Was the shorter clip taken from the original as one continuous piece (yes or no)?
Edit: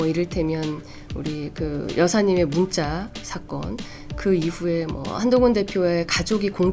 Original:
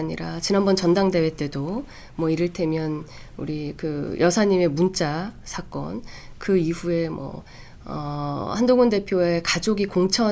no